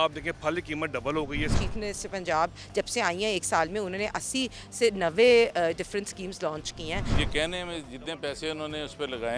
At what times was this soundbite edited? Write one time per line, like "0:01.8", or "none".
0:01.5
0:07.1